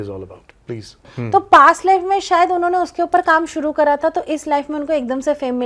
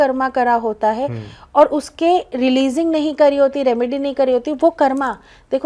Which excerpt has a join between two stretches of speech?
first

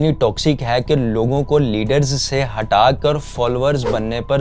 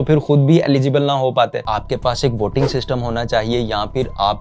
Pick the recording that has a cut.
second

